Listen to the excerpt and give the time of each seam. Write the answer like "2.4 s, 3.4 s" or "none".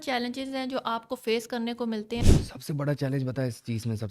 2.2 s